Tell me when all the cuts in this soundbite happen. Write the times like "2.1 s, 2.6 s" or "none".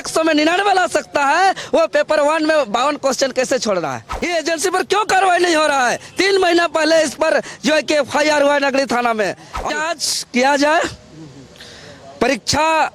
4.1 s, 9.7 s